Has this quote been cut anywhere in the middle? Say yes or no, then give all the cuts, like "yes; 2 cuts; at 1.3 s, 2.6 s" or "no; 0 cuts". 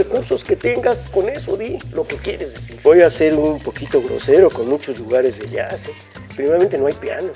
yes; 1 cut; at 2.6 s